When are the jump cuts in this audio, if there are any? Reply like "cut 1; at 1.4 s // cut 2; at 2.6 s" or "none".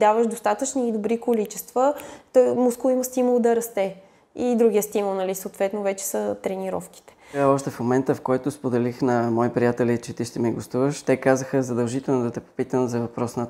cut 1; at 7.4 s

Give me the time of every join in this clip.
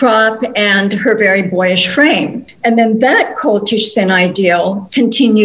cut 1; at 2.4 s

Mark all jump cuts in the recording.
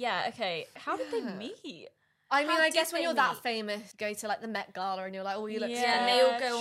cut 1; at 0.8 s // cut 2; at 3.9 s

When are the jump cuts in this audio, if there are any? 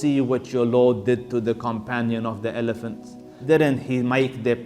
cut 1; at 3.3 s

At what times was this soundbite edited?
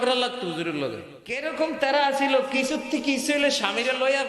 cut 1; at 1.2 s

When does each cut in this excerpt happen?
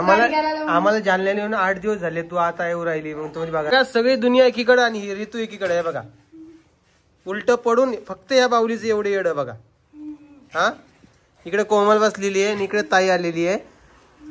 cut 1; at 3.7 s

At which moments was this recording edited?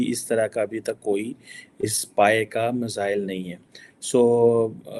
none

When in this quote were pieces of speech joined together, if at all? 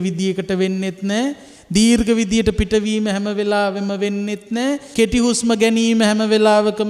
cut 1; at 4.9 s

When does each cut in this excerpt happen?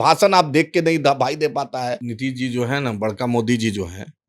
cut 1; at 2.1 s

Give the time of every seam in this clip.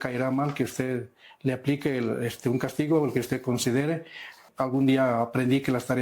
cut 1; at 4.4 s

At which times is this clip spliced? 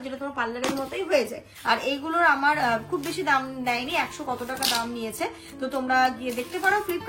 cut 1; at 1.5 s

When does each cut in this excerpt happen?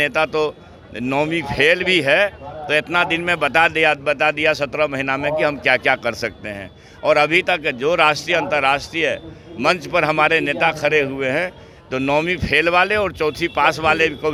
none

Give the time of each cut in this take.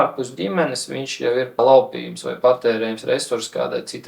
cut 1; at 1.6 s

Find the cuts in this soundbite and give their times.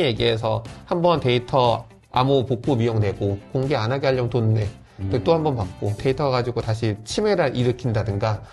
cut 1; at 3.4 s // cut 2; at 6.0 s

